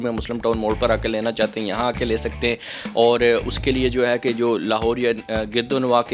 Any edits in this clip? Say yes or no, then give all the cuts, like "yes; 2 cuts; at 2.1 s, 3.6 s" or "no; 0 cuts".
no; 0 cuts